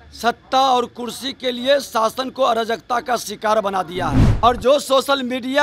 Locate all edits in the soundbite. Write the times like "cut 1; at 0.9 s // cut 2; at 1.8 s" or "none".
cut 1; at 4.3 s